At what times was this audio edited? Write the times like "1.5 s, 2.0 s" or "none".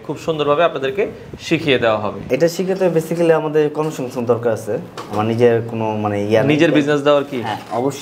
2.3 s

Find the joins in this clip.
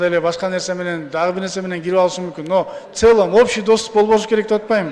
none

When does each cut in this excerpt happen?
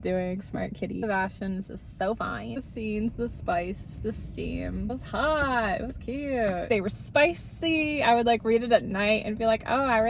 1.0 s, 2.5 s, 6.7 s

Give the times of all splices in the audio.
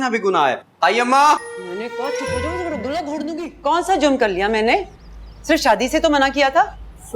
3.5 s

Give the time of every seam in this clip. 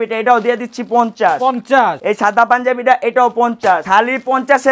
2.0 s, 3.8 s

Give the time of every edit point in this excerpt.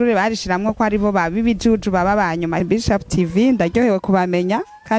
2.6 s

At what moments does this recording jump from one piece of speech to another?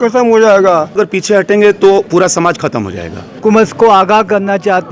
0.9 s, 3.3 s

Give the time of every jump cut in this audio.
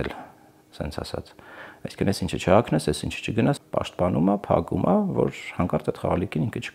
3.6 s

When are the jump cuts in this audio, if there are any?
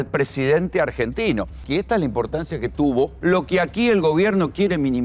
1.6 s, 3.1 s

